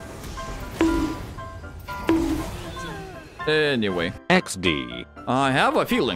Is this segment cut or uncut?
cut